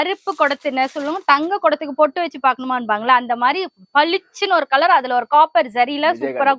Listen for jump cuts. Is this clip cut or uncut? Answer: uncut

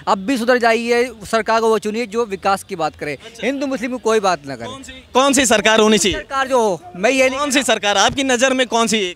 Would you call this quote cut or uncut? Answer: uncut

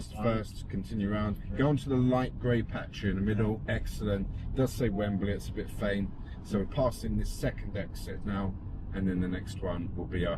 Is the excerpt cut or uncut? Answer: uncut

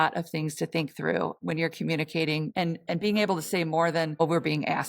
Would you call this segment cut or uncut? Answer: cut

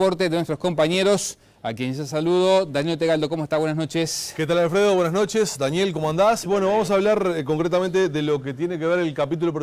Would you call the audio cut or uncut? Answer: uncut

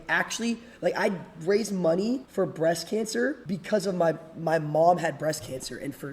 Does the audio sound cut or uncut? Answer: cut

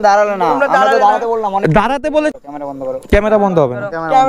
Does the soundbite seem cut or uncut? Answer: cut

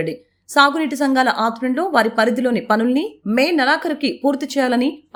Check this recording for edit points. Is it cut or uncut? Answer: uncut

